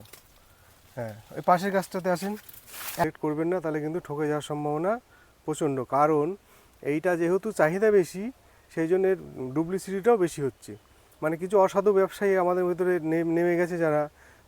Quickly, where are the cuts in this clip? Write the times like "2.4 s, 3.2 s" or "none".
3.0 s